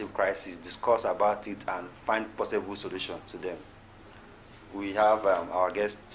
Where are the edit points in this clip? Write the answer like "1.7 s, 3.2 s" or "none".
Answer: none